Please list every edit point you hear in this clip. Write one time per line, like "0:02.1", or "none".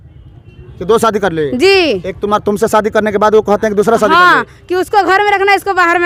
none